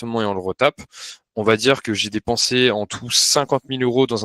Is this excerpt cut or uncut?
uncut